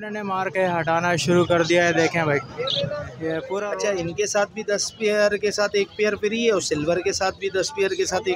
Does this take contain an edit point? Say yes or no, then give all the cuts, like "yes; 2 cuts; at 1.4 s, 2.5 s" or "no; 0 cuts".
yes; 1 cut; at 3.5 s